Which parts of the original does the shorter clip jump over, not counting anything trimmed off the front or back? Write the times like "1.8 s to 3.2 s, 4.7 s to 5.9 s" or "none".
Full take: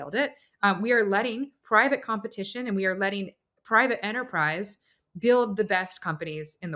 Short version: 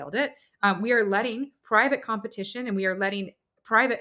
none